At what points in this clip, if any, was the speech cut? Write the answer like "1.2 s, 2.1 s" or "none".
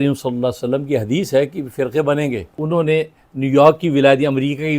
2.6 s